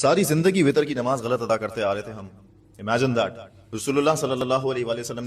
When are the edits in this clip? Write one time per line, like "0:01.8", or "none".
0:03.7